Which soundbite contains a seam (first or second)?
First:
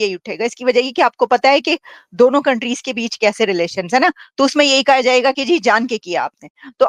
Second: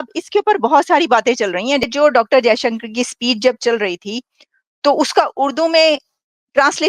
second